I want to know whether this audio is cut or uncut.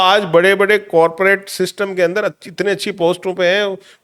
uncut